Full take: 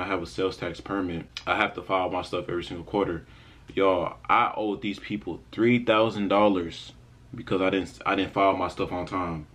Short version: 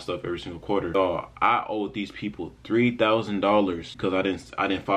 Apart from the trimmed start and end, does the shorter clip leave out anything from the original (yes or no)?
yes